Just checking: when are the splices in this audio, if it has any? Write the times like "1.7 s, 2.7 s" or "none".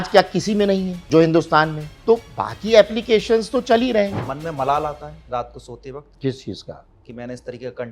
0.9 s, 1.9 s, 4.2 s, 6.1 s

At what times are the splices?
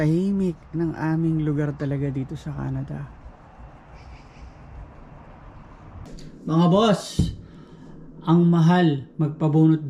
6.2 s

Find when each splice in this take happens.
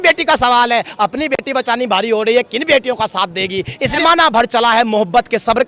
4.0 s

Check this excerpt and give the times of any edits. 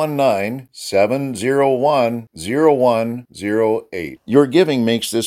none

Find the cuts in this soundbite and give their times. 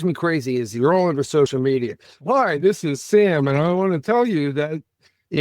1.6 s

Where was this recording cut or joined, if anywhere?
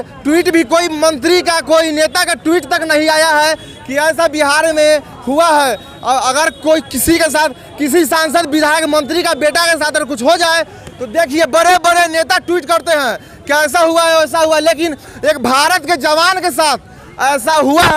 none

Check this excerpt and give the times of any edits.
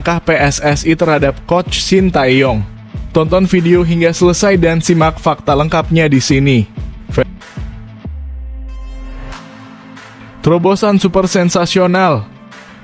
7.2 s, 10.4 s

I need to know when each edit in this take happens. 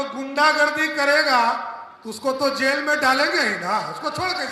none

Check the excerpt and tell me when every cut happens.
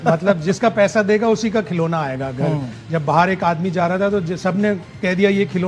none

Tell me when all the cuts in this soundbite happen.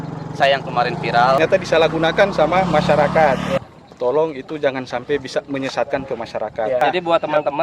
1.4 s, 3.5 s, 6.8 s

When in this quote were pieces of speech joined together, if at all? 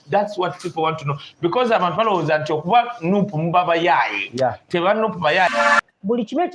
5.5 s

